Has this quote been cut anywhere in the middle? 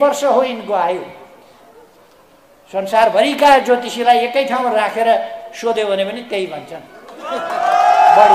no; 0 cuts

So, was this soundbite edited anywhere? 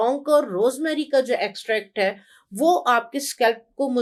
no; 0 cuts

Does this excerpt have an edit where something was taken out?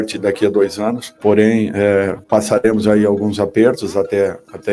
yes; 2 cuts; at 1.1 s, 2.2 s

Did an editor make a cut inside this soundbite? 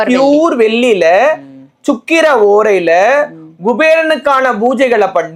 no; 0 cuts

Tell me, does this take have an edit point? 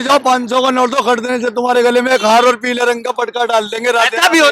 no; 0 cuts

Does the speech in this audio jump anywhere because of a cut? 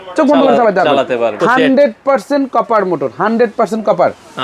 yes; 1 cut; at 1.4 s

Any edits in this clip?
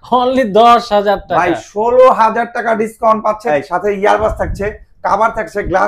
yes; 1 cut; at 3.4 s

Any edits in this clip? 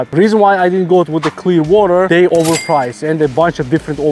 yes; 1 cut; at 2.2 s

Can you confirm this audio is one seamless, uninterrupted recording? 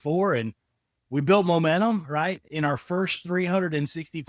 yes; 0 cuts

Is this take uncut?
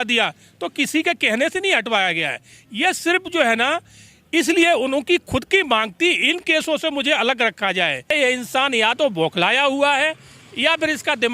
no; 1 cut; at 8.1 s

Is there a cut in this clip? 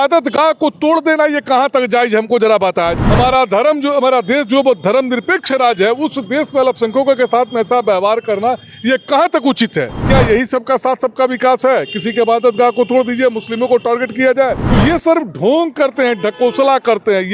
yes; 3 cuts; at 3.0 s, 10.0 s, 14.6 s

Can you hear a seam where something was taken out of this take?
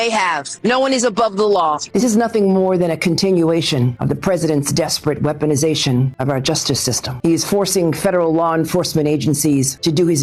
yes; 1 cut; at 1.8 s

